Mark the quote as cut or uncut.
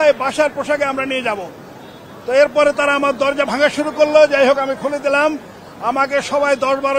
uncut